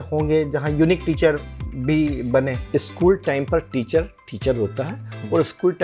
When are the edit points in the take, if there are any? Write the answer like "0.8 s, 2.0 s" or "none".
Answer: 2.6 s